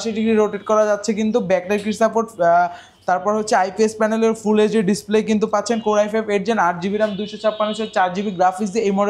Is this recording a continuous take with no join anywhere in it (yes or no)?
yes